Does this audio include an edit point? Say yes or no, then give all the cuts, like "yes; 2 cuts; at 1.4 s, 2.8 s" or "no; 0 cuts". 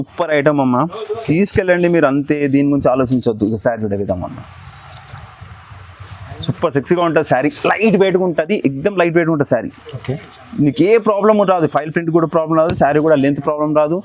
no; 0 cuts